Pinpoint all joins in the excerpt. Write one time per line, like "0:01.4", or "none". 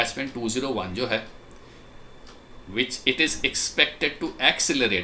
none